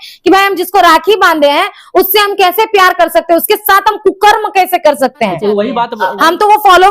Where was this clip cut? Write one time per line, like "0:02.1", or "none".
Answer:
0:05.9

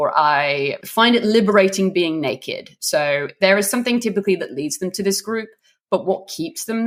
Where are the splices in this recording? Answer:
none

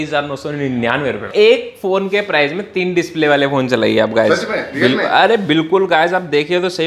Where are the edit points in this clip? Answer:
0:01.2

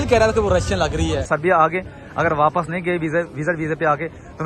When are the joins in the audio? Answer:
0:01.3

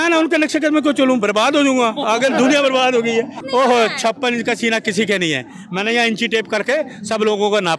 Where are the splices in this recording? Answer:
0:03.4

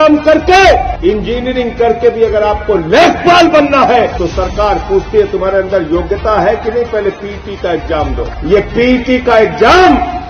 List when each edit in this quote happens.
0:00.9
0:04.1
0:08.3

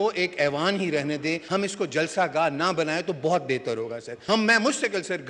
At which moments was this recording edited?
0:01.4
0:04.1

